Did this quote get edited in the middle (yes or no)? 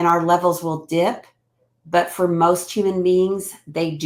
no